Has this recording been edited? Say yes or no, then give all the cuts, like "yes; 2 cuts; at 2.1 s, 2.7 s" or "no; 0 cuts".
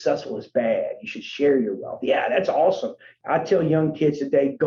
yes; 1 cut; at 3.1 s